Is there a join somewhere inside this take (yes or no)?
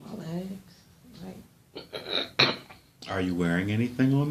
no